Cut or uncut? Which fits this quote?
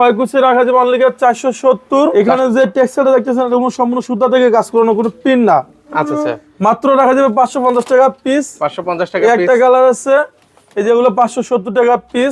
cut